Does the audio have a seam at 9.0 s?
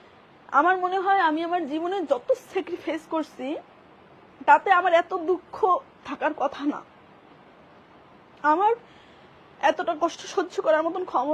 no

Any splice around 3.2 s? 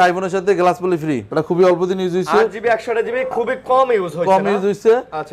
no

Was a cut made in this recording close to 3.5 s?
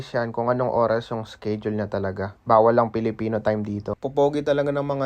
yes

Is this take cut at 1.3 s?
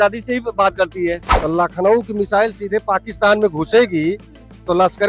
yes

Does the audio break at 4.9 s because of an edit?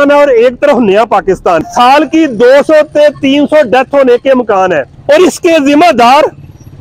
yes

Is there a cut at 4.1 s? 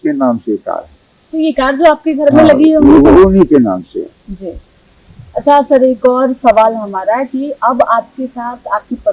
no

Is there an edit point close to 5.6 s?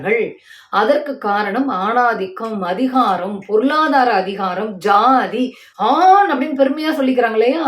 yes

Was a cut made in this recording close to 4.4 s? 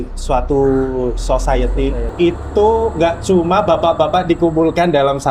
no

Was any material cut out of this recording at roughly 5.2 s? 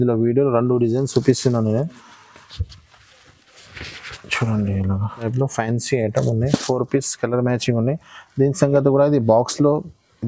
yes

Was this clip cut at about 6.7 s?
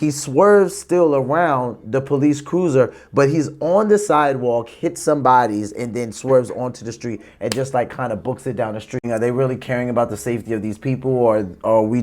no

